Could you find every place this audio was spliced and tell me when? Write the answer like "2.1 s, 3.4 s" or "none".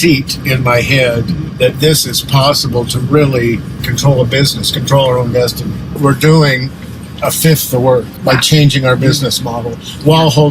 1.5 s, 3.7 s, 6.0 s, 8.1 s